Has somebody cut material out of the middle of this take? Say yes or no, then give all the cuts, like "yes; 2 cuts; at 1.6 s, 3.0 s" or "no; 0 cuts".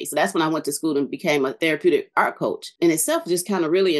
yes; 2 cuts; at 1.6 s, 2.7 s